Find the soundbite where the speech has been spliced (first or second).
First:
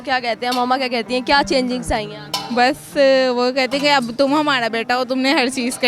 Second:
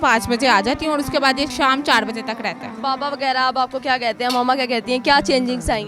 second